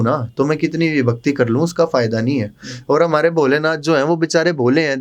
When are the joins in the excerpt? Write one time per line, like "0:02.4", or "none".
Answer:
none